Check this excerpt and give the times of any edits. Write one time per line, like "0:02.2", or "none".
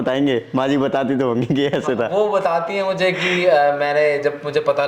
none